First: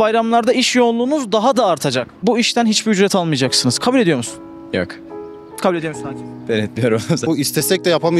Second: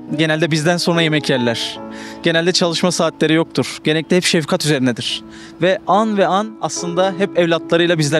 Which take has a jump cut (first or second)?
first